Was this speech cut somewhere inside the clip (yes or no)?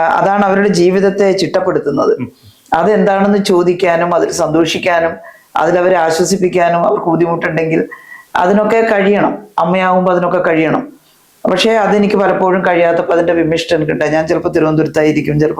no